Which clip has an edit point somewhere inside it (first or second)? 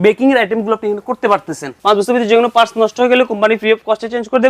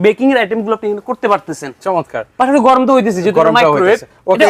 first